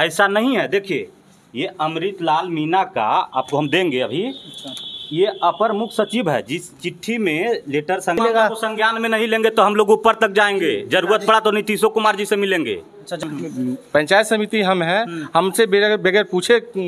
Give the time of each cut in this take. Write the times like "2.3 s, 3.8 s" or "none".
8.2 s, 13.2 s